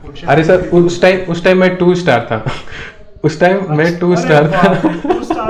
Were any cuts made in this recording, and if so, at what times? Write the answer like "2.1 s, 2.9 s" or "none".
none